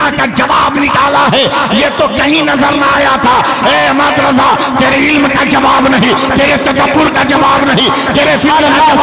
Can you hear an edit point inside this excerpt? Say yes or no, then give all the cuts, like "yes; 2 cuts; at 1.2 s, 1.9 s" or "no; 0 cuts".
no; 0 cuts